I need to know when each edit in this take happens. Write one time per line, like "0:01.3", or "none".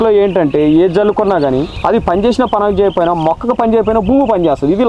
0:01.7

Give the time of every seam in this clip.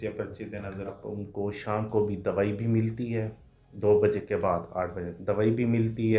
0:01.0

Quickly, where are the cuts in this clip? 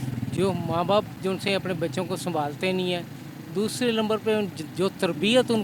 none

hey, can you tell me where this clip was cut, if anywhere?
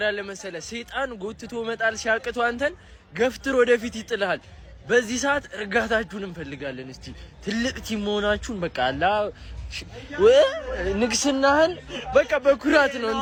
none

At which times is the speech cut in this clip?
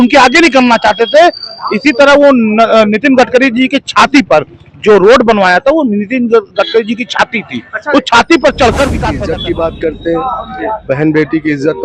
0:09.0

